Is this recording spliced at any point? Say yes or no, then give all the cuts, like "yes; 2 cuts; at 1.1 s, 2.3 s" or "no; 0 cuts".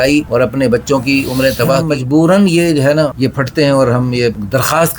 yes; 1 cut; at 1.8 s